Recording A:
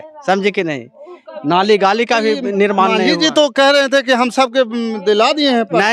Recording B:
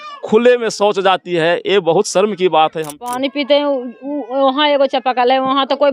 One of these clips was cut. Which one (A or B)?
B